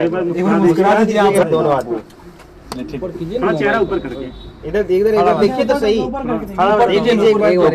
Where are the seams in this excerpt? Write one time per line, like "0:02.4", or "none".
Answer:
0:01.4